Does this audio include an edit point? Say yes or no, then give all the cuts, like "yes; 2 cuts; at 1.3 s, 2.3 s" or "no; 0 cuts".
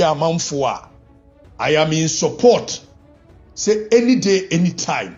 no; 0 cuts